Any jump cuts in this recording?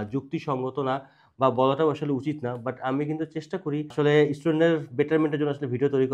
no; 0 cuts

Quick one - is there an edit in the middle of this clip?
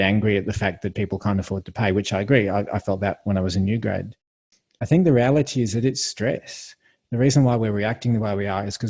yes; 1 cut; at 4.5 s

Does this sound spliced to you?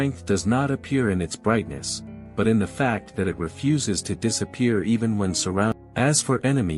yes; 1 cut; at 5.7 s

